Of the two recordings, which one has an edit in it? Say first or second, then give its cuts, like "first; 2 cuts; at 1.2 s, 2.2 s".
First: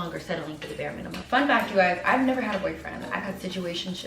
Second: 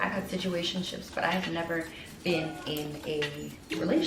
first; 1 cut; at 1.2 s